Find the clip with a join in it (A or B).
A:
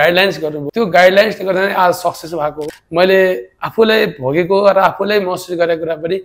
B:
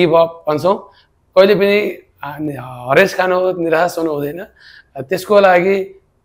A